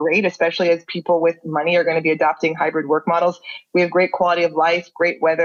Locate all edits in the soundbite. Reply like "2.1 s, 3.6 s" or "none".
none